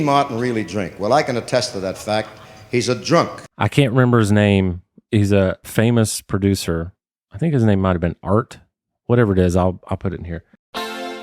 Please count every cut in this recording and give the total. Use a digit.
2